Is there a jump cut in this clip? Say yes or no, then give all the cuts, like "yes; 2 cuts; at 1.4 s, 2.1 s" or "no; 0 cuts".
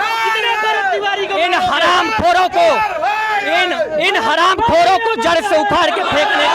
no; 0 cuts